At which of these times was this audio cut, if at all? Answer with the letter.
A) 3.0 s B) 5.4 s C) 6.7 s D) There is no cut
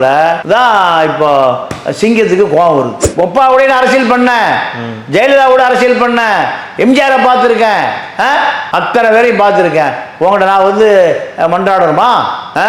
A